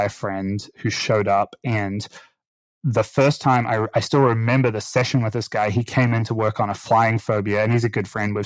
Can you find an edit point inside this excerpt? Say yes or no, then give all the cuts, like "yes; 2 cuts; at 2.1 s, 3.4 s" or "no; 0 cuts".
no; 0 cuts